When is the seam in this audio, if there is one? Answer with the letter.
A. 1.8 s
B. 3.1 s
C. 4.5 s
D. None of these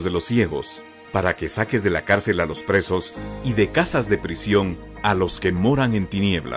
A